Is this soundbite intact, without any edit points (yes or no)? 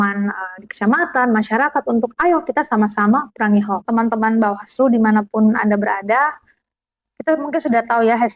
no